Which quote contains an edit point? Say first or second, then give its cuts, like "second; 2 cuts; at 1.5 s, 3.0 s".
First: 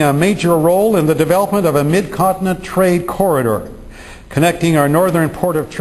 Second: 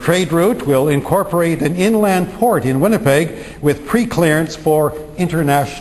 first; 1 cut; at 3.8 s